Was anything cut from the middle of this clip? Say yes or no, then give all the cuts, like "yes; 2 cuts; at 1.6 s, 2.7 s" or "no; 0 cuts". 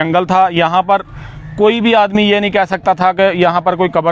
no; 0 cuts